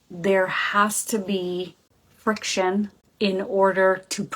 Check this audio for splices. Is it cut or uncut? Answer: cut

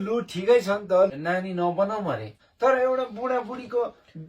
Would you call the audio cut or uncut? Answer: cut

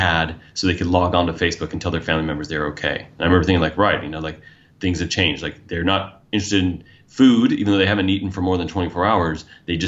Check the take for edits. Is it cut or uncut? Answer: uncut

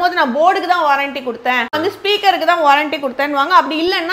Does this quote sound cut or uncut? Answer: cut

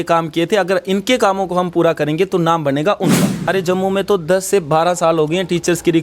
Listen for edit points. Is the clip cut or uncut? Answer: cut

